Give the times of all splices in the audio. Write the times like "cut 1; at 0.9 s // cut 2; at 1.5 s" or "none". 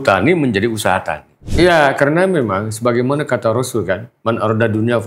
cut 1; at 1.4 s